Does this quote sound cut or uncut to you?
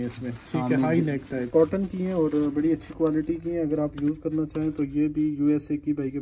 cut